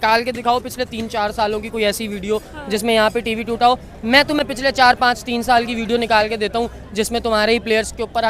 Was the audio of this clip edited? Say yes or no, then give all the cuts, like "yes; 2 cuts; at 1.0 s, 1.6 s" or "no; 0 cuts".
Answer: no; 0 cuts